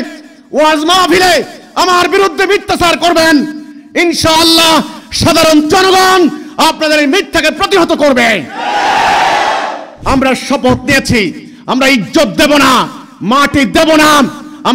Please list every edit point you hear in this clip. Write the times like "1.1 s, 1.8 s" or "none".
10.0 s